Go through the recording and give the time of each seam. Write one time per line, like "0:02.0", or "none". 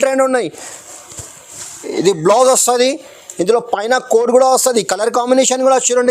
none